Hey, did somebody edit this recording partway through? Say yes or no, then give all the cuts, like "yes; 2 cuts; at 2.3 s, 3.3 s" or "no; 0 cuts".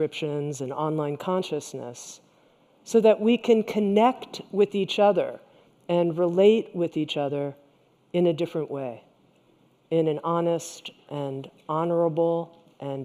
no; 0 cuts